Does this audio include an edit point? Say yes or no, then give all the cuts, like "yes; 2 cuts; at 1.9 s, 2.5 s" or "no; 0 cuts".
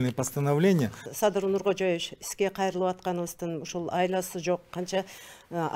yes; 1 cut; at 1.0 s